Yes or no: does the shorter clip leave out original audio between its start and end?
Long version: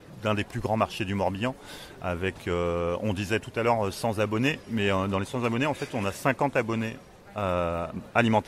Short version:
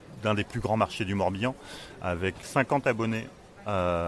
yes